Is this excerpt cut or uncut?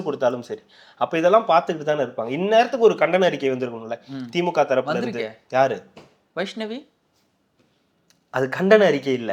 uncut